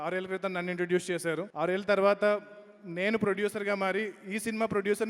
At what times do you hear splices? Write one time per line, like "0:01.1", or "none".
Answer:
0:01.5

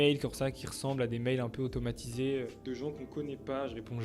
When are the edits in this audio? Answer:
0:02.5

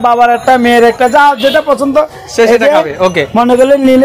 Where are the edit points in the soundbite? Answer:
none

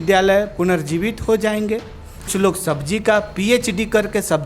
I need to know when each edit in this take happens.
0:02.3

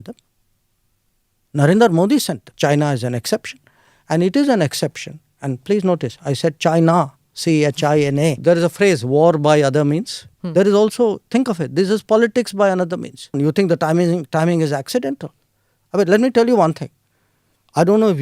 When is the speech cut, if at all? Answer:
0:02.5
0:08.4
0:13.3

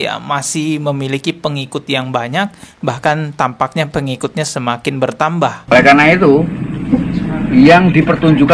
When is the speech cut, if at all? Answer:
0:05.6

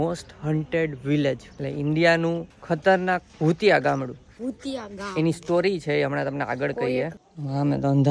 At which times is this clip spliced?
0:01.5
0:03.3
0:07.2

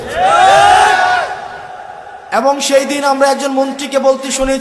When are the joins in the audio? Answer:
none

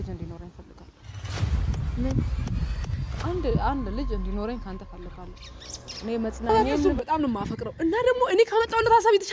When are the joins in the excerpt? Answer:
0:06.5

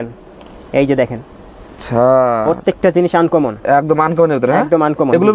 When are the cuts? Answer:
none

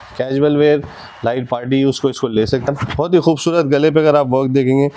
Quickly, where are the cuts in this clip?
none

